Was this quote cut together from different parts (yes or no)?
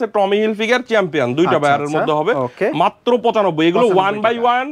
no